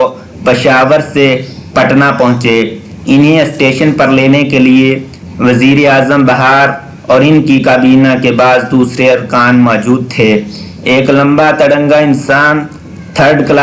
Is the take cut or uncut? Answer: uncut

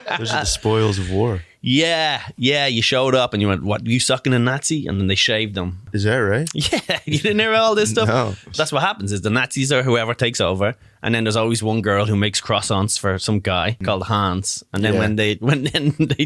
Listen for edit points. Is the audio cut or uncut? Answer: cut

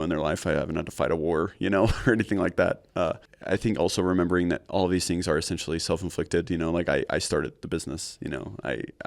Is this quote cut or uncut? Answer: cut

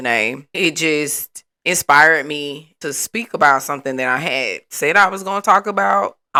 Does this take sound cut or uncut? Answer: uncut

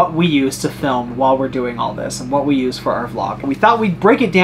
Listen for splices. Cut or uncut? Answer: cut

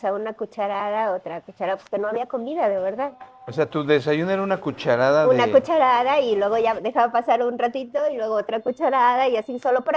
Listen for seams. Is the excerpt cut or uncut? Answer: uncut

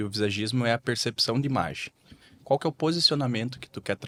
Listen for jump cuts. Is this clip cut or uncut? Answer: uncut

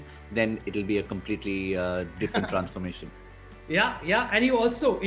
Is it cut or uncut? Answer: uncut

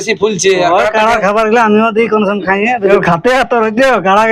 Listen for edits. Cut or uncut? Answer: cut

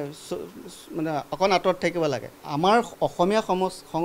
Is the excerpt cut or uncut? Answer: cut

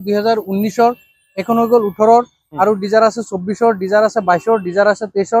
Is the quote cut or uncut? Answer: uncut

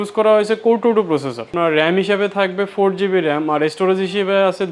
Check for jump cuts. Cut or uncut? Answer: cut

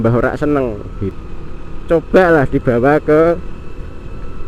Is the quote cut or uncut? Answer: cut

